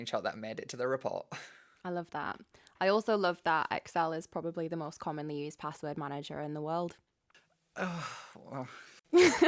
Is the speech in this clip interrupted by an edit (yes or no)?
no